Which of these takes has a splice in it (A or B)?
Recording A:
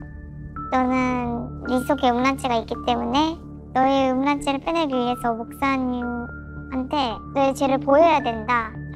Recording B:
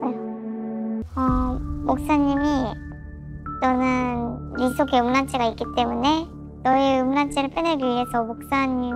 B